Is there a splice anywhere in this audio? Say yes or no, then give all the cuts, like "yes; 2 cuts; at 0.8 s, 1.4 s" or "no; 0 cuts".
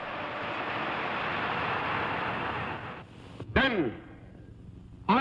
yes; 1 cut; at 2.8 s